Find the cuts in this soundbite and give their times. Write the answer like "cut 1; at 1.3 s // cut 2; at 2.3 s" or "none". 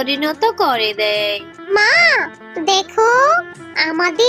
cut 1; at 1.7 s